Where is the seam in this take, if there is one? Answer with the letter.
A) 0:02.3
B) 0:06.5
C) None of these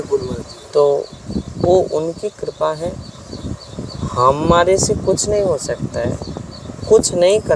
C